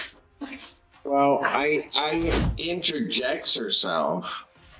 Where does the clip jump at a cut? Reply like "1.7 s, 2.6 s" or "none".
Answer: 2.4 s

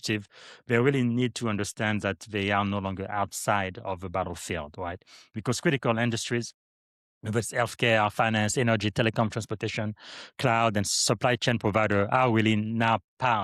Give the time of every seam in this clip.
none

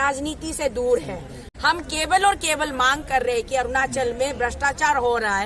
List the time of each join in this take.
1.4 s

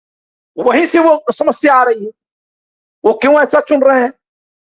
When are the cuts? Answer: none

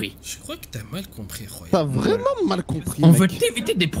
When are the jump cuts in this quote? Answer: 1.6 s

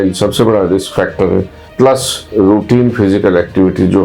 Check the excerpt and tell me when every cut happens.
1.6 s

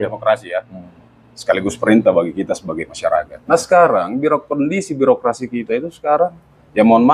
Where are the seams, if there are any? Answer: 3.3 s

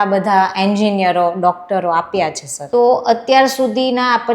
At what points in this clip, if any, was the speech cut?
2.5 s

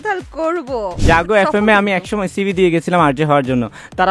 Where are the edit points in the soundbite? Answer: 1.0 s

